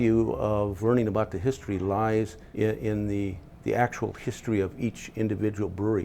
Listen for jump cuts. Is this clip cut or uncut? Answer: cut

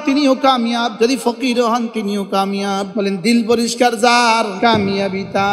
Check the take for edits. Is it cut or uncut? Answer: cut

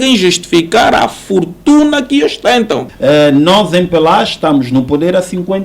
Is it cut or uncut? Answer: cut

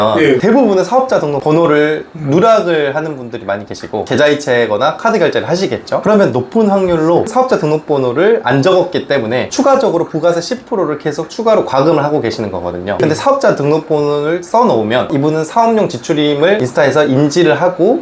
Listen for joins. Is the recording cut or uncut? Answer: uncut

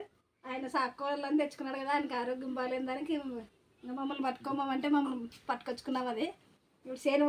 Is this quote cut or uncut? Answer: uncut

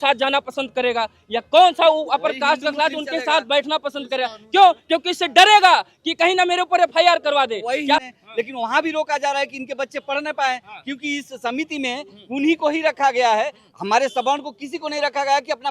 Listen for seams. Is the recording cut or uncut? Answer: cut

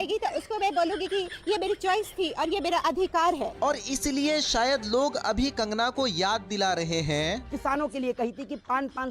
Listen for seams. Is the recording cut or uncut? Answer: uncut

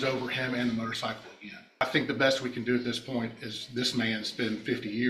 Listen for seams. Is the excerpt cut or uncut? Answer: cut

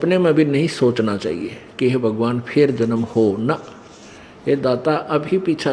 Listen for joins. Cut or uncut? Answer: uncut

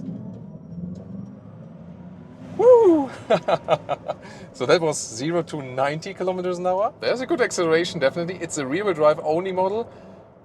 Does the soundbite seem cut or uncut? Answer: cut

